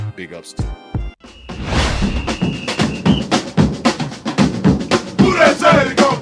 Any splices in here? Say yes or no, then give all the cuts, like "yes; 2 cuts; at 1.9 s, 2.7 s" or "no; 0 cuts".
yes; 1 cut; at 1.2 s